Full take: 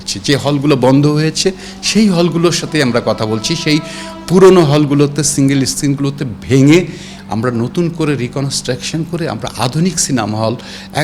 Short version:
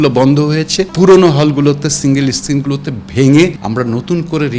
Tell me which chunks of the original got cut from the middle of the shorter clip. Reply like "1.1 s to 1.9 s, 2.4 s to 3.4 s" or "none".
1.6 s to 4.2 s, 6.9 s to 7.3 s